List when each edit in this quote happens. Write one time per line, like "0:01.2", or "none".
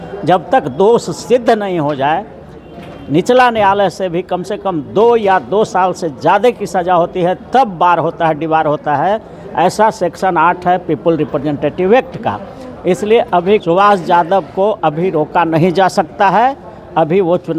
none